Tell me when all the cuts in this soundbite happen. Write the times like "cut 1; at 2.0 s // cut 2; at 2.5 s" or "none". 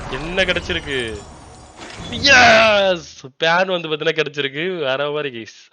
none